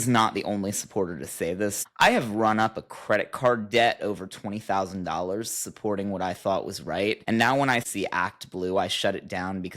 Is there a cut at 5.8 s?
no; 2 cuts; at 1.9 s, 7.9 s

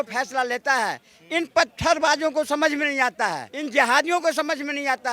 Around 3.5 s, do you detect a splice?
yes; 1 cut; at 3.5 s

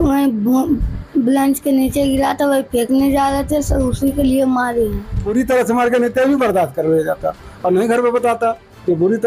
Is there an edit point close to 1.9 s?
no; 1 cut; at 5.3 s

